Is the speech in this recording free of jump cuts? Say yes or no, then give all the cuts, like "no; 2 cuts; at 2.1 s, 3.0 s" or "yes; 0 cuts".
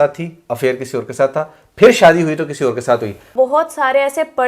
no; 1 cut; at 3.3 s